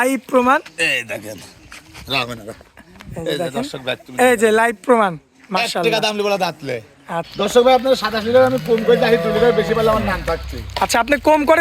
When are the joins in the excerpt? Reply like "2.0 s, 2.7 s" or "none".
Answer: 7.2 s